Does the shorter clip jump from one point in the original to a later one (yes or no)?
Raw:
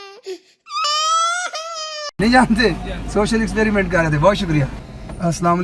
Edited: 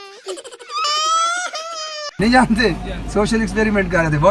no